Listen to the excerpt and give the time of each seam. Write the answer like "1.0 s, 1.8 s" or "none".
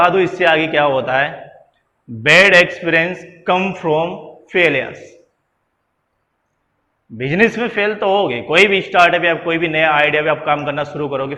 none